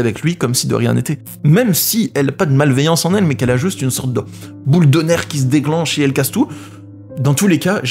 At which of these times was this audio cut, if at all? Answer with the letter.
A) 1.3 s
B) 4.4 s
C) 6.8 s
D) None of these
A